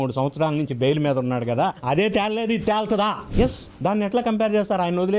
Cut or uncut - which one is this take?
cut